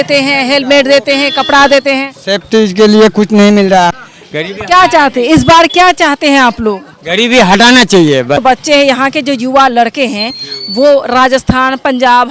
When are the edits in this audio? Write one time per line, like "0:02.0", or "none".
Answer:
0:03.9
0:08.4